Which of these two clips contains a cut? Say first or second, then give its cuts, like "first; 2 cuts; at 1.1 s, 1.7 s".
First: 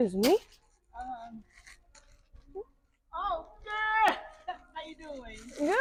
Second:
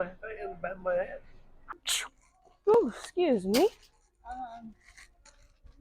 second; 1 cut; at 1.7 s